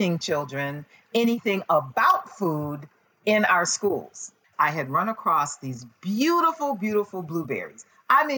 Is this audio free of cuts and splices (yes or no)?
no